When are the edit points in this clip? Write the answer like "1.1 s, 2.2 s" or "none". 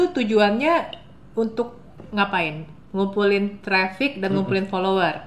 none